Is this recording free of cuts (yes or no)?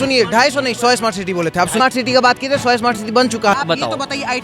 no